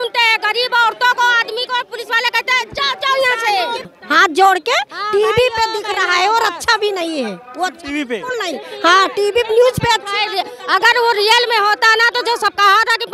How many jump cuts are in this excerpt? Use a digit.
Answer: 1